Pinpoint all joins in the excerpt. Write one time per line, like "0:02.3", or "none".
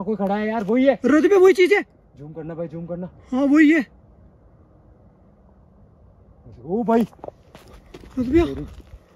none